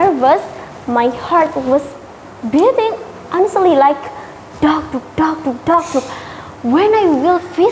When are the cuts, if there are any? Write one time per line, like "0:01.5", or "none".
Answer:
none